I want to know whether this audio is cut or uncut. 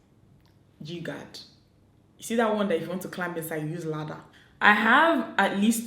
cut